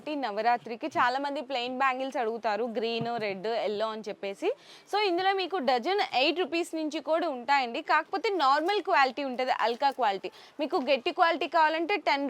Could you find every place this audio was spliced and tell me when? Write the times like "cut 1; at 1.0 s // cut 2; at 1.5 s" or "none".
none